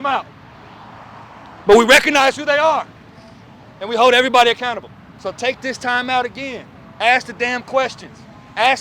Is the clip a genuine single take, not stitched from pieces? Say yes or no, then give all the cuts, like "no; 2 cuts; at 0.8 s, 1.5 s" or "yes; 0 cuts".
no; 1 cut; at 5.0 s